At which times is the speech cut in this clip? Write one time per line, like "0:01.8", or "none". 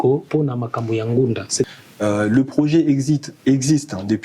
0:01.7